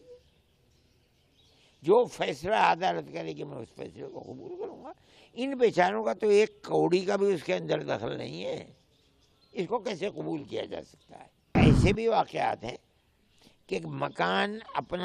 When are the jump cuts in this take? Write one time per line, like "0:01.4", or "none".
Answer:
0:11.5

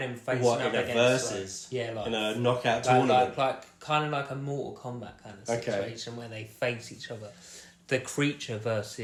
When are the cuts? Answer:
none

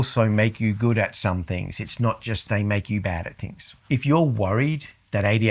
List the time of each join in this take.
0:03.7

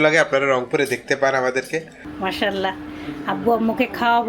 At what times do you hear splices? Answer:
0:02.0

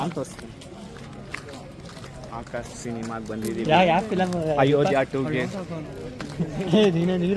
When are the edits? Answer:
none

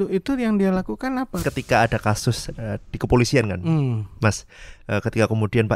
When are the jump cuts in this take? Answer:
0:01.4

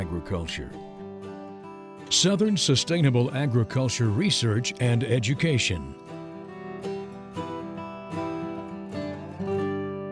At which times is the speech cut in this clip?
0:05.9

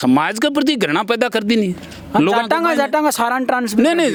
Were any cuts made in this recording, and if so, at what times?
none

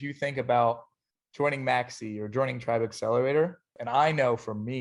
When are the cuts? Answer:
0:03.7

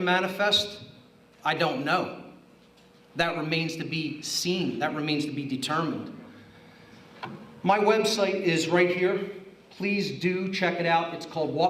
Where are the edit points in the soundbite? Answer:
none

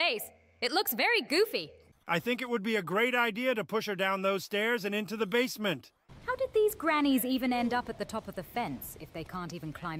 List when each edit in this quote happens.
0:01.9
0:05.9

